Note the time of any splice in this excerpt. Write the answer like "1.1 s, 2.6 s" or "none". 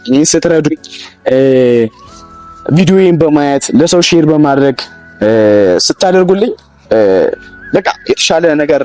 none